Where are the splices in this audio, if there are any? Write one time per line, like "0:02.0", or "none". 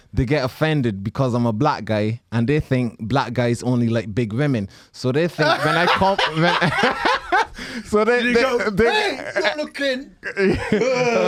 none